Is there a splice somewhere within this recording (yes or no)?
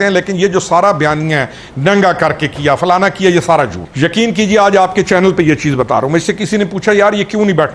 yes